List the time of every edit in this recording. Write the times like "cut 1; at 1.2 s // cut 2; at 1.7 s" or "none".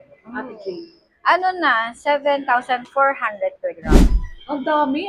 cut 1; at 3.9 s